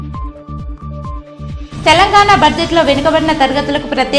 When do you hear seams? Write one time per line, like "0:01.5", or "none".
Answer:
0:01.7